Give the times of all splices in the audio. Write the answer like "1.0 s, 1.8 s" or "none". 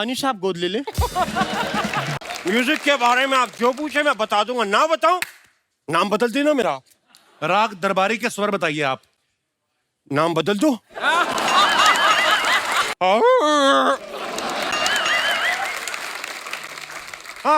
2.2 s, 12.9 s